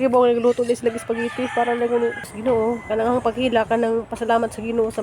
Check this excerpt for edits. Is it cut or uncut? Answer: cut